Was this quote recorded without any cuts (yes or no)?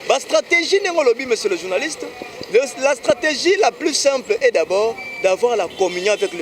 yes